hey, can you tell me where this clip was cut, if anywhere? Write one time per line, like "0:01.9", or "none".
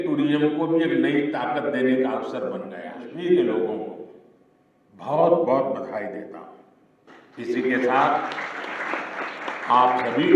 0:03.1